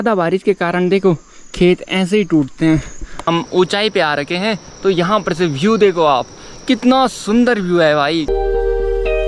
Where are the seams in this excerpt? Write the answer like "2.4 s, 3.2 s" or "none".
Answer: 3.2 s, 8.3 s